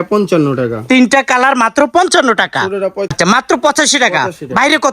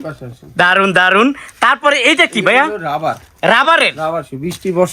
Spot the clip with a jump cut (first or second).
first